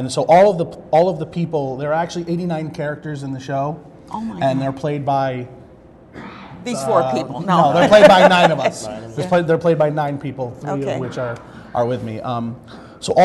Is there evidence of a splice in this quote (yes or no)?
no